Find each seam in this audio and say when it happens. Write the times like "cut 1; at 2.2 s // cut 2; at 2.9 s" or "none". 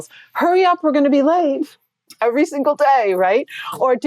cut 1; at 2.1 s